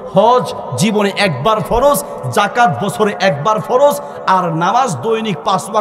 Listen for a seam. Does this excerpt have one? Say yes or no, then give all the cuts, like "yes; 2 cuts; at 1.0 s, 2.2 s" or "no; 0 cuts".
no; 0 cuts